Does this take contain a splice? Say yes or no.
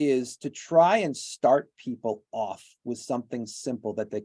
no